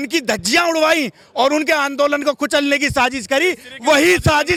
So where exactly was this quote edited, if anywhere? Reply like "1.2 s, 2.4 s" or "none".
none